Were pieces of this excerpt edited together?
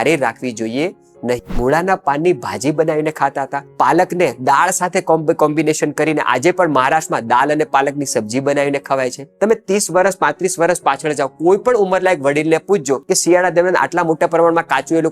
yes; 4 cuts; at 1.5 s, 3.6 s, 9.2 s, 13.0 s

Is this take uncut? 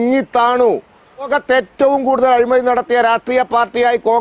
no; 1 cut; at 1.3 s

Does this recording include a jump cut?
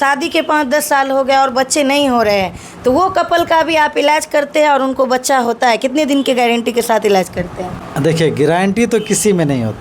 no; 0 cuts

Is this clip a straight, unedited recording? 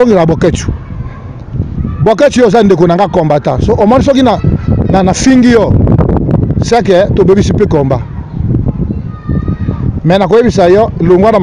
yes; 0 cuts

